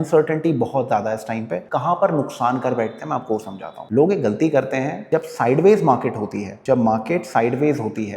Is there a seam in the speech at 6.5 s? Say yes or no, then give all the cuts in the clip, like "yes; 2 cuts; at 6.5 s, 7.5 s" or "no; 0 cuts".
no; 1 cut; at 1.6 s